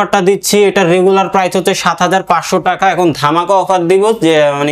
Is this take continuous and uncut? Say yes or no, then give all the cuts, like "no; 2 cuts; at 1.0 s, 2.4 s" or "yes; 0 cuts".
yes; 0 cuts